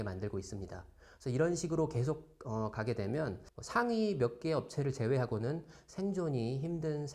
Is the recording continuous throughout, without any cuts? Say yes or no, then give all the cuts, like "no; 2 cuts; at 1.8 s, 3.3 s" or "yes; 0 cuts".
no; 1 cut; at 3.4 s